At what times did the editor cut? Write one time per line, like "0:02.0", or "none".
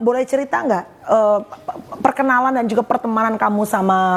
none